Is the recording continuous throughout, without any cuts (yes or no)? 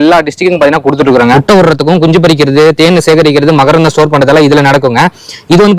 no